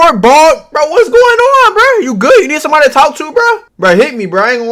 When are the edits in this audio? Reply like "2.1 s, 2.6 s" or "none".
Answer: 3.7 s